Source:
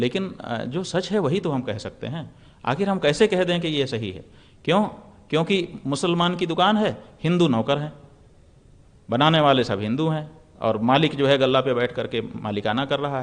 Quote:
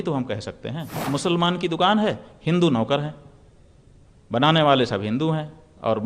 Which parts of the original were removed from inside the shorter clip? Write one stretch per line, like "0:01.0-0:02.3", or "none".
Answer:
0:02.4-0:05.8